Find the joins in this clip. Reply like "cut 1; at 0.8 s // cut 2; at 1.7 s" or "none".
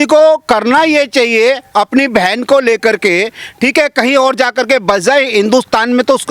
none